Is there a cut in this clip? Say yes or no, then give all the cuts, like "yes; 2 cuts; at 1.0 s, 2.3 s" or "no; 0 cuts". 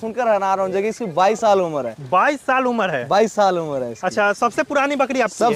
no; 0 cuts